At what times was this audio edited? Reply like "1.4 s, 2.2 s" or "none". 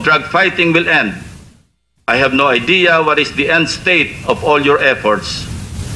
3.5 s